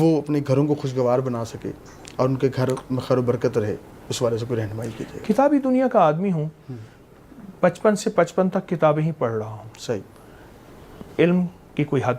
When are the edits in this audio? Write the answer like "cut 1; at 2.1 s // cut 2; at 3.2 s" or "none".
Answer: none